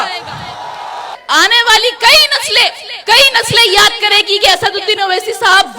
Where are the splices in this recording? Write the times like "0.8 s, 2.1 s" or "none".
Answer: 1.2 s

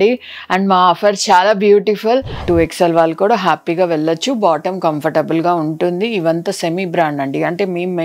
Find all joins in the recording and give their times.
2.4 s

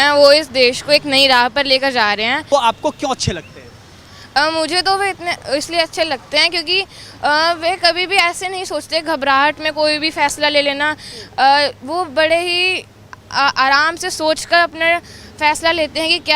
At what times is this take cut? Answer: 2.5 s

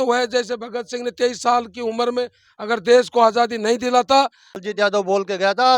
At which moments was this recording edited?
4.6 s

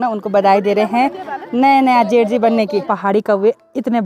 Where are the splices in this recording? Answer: 2.8 s

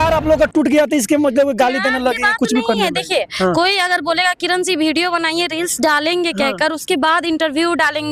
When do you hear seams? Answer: none

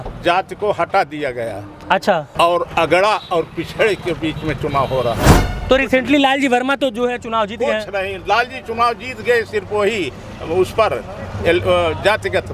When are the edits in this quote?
2.3 s, 5.5 s

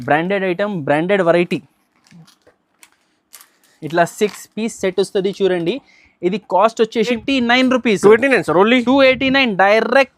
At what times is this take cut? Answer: 7.1 s

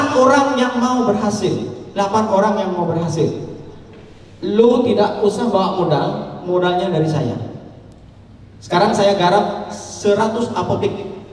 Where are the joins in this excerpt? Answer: none

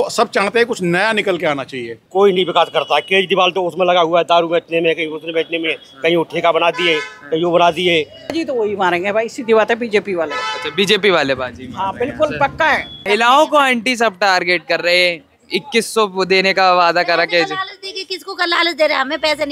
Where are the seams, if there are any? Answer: 1.9 s, 8.2 s, 12.9 s

